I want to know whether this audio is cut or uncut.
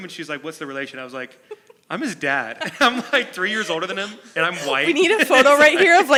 uncut